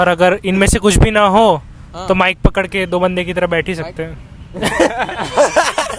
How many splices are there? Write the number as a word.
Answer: zero